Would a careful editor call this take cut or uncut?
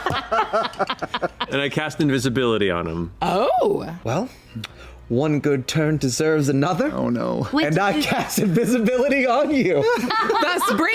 cut